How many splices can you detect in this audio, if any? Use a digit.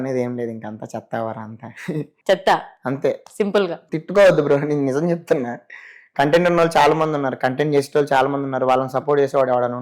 2